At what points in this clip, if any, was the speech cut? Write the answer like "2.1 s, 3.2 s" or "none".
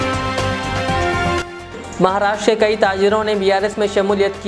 1.4 s